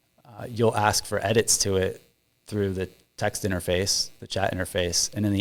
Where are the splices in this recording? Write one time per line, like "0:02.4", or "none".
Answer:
none